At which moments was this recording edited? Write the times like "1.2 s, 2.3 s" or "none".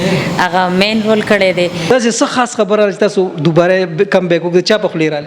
1.9 s